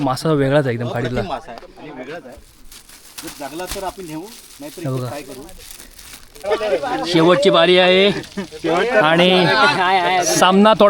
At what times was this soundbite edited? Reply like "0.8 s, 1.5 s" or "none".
6.4 s